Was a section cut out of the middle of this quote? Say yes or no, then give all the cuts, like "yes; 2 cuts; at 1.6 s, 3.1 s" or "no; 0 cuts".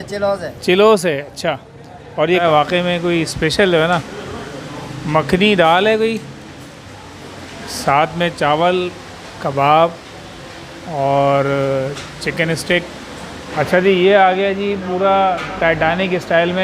yes; 2 cuts; at 2.4 s, 13.4 s